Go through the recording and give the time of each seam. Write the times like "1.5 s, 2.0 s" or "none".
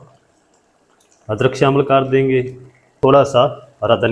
2.9 s